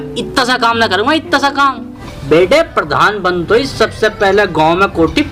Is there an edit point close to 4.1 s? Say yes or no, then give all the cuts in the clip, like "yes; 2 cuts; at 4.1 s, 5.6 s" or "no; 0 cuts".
no; 1 cut; at 2.1 s